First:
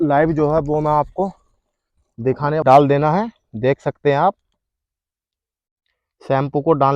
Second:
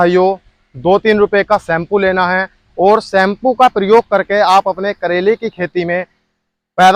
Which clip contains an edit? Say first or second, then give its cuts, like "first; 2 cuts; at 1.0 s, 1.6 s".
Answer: first; 1 cut; at 2.6 s